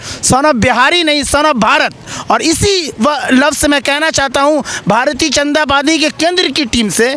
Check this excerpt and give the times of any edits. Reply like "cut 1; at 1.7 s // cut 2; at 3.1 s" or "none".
none